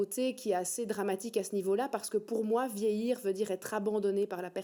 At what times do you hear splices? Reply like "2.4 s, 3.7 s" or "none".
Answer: none